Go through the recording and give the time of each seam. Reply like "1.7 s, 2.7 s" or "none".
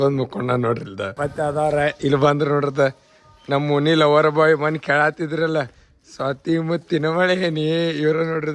1.1 s